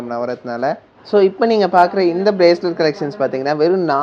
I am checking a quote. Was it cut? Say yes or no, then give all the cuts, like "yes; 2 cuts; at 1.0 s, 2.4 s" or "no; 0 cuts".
yes; 1 cut; at 0.9 s